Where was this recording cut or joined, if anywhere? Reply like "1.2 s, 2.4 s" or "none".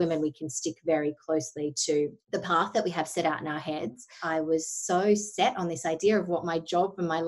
4.2 s